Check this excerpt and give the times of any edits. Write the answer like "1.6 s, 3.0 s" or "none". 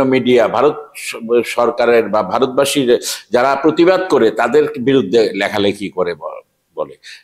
none